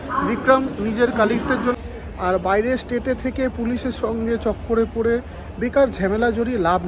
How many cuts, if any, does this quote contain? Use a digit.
1